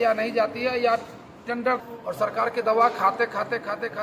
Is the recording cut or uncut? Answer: cut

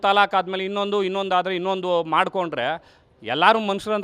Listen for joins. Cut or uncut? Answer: uncut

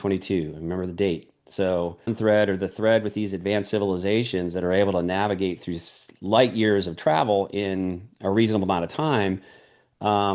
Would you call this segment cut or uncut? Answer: cut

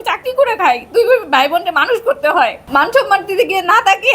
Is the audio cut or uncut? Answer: cut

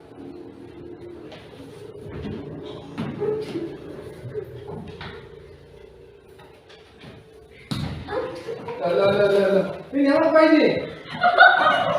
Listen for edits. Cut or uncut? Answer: uncut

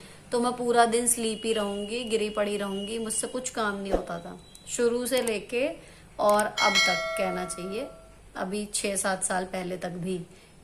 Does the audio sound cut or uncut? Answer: uncut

